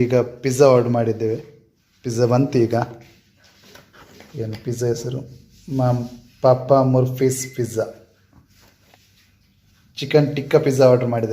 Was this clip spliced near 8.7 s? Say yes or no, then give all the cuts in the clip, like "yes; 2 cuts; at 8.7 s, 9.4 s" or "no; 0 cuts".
yes; 1 cut; at 8.7 s